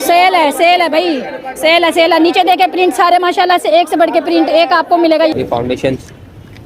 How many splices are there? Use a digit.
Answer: 1